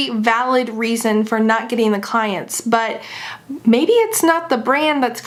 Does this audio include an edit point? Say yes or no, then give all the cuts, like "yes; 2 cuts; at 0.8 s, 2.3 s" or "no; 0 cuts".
no; 0 cuts